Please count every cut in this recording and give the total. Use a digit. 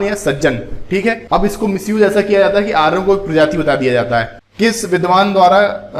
2